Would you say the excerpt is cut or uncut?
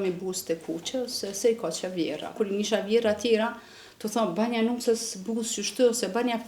cut